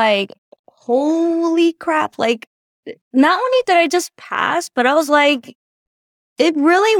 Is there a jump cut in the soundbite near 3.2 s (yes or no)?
no